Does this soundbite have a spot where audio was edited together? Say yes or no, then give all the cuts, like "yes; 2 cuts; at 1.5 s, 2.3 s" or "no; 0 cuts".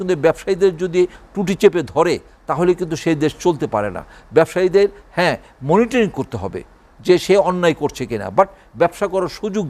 no; 0 cuts